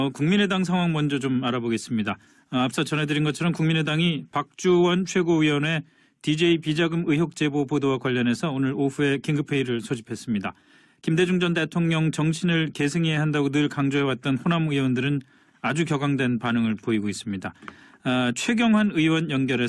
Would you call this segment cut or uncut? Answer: uncut